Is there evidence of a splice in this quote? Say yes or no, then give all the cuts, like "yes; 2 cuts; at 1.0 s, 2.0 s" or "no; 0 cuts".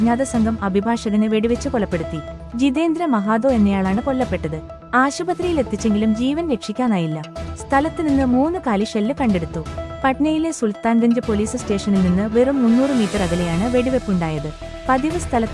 no; 0 cuts